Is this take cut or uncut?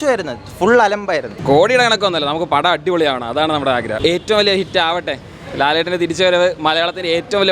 cut